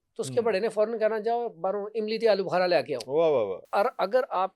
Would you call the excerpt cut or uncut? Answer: cut